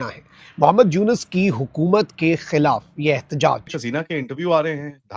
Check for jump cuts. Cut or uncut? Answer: cut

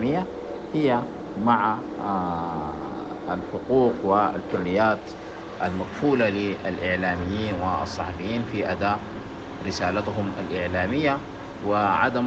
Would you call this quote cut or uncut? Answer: uncut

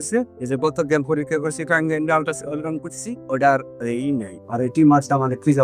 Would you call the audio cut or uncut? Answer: uncut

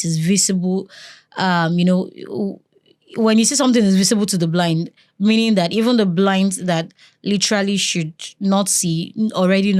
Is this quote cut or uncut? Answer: uncut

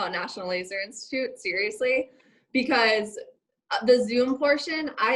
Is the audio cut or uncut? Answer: uncut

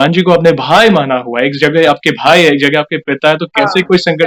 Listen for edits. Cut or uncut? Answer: uncut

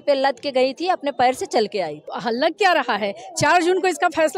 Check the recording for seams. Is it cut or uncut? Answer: cut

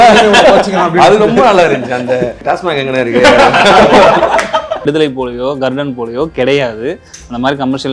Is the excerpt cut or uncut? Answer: cut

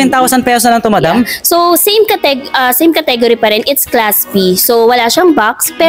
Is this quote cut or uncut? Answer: uncut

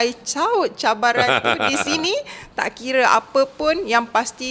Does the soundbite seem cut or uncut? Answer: uncut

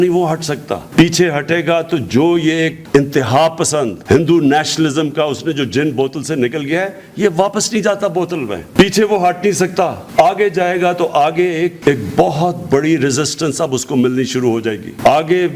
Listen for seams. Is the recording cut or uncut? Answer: uncut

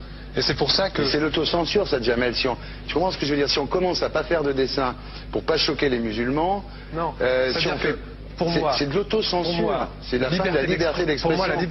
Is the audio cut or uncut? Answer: uncut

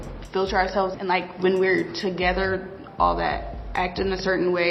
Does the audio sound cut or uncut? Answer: uncut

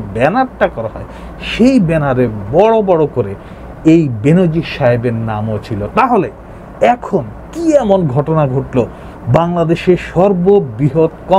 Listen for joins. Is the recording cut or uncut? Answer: uncut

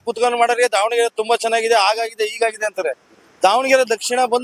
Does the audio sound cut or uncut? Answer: uncut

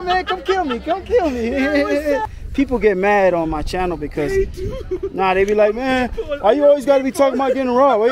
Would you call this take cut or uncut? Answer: cut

